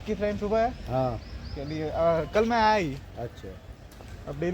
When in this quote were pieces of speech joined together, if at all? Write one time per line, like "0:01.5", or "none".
none